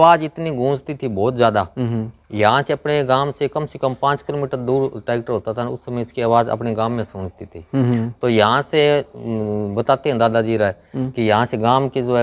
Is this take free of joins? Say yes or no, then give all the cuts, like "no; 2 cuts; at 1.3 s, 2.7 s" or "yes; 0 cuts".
yes; 0 cuts